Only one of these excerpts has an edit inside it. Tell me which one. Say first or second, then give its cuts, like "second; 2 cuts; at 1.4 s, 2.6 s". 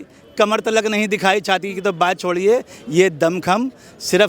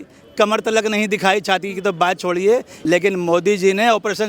second; 1 cut; at 2.7 s